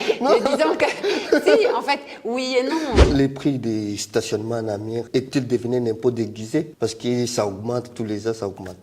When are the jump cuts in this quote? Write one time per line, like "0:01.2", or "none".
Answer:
0:03.0
0:05.1
0:06.7